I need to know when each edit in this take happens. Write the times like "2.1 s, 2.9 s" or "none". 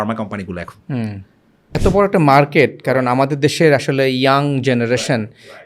1.8 s